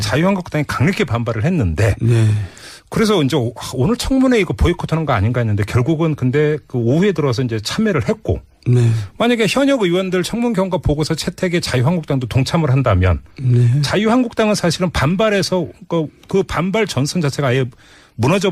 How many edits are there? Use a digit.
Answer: 0